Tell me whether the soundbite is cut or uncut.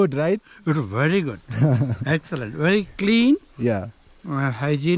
uncut